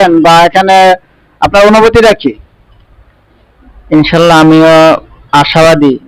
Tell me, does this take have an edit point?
no; 0 cuts

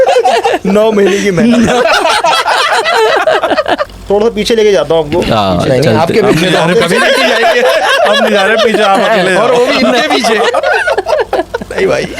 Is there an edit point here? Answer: yes; 1 cut; at 3.8 s

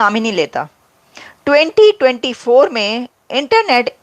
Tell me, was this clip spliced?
no; 0 cuts

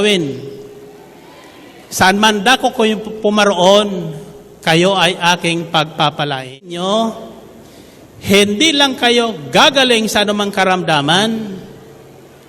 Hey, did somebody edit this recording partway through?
yes; 1 cut; at 6.6 s

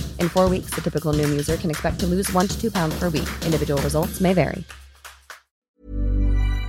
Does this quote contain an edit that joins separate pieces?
yes; 1 cut; at 5.7 s

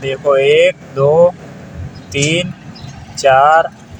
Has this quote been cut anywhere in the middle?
no; 0 cuts

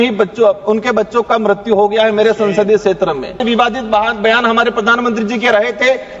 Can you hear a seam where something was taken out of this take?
yes; 1 cut; at 3.4 s

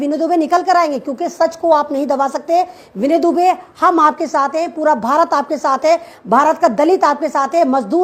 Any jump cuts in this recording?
no; 0 cuts

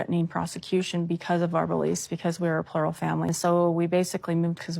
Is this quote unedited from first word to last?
no; 1 cut; at 3.3 s

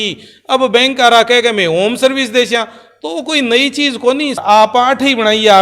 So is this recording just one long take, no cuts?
no; 1 cut; at 4.4 s

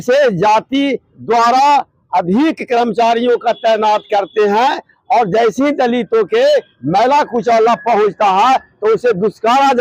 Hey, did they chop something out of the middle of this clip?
no; 0 cuts

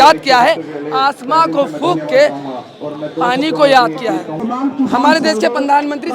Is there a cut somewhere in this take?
yes; 1 cut; at 4.4 s

